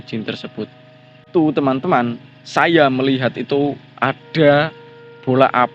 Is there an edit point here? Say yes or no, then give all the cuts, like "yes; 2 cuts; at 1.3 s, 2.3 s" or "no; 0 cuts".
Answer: yes; 1 cut; at 1.2 s